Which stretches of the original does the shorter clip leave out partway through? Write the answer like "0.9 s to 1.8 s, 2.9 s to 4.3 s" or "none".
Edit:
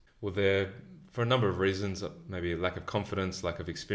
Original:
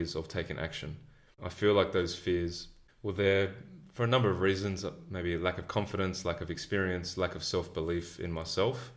none